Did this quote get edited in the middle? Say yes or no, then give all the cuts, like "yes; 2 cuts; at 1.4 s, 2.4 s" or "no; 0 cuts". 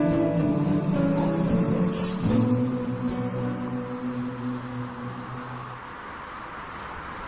no; 0 cuts